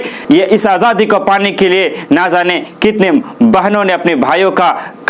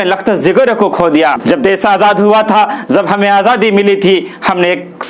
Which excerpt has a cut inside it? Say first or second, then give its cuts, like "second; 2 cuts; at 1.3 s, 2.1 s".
second; 1 cut; at 1.4 s